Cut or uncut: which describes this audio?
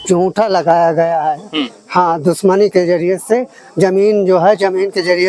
uncut